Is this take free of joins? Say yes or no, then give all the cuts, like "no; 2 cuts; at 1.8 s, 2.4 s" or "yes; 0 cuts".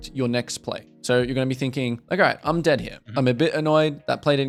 yes; 0 cuts